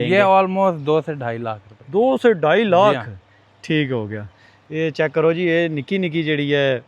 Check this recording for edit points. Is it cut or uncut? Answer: uncut